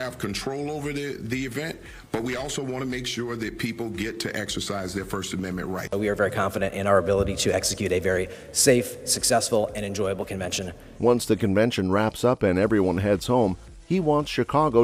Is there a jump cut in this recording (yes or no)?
no